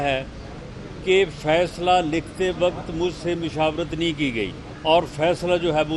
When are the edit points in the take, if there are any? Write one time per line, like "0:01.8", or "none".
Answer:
0:04.7